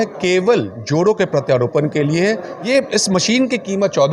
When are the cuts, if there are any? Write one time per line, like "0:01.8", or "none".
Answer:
0:02.5